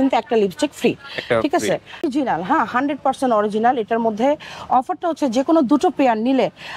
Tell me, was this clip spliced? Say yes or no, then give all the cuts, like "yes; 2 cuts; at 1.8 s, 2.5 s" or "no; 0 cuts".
yes; 1 cut; at 2.0 s